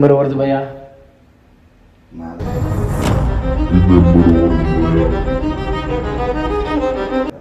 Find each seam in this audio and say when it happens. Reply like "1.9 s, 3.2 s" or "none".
none